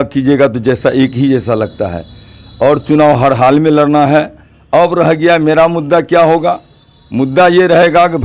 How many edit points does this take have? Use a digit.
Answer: 0